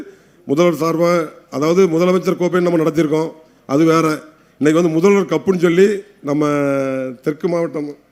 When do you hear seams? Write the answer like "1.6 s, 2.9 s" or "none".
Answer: none